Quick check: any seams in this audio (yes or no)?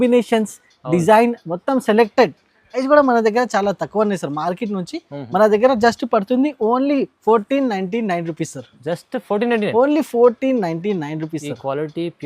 yes